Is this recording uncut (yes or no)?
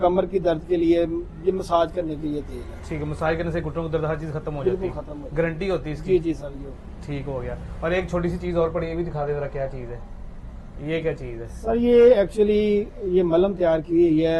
yes